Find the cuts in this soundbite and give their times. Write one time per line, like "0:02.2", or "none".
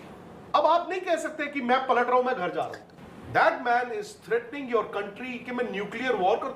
0:02.8

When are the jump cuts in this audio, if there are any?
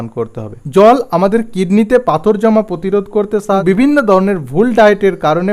0:03.6

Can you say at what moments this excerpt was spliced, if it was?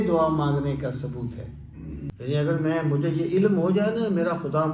0:02.1

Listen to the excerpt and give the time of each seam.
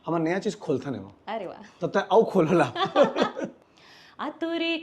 0:03.6

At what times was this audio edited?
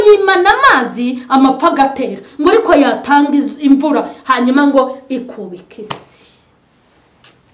none

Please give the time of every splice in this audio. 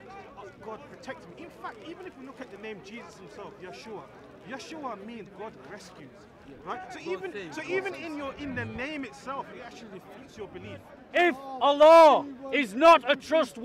0:11.0

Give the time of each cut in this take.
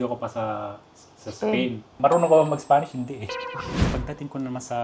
0:02.0
0:03.9

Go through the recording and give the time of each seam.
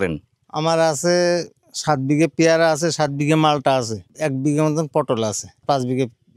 0:04.0
0:05.6

